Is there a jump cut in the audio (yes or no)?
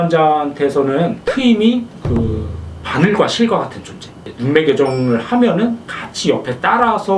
yes